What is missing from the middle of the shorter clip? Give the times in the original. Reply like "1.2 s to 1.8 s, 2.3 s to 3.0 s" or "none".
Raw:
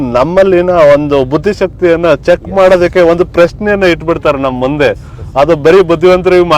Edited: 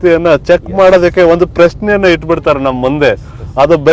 none